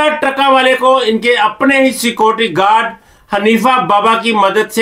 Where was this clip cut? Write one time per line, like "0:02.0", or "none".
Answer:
none